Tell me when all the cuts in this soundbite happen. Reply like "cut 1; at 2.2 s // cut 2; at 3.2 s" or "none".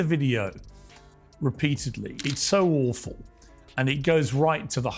cut 1; at 2.1 s